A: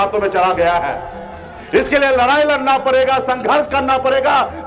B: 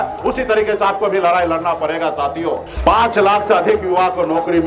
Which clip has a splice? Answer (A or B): B